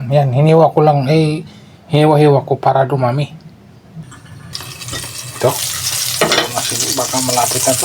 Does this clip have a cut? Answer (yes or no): yes